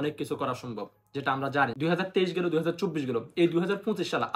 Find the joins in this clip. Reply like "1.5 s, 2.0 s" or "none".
1.7 s